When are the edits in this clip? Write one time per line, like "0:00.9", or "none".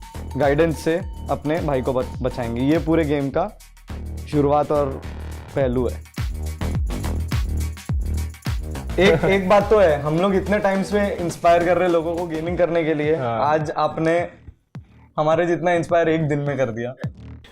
none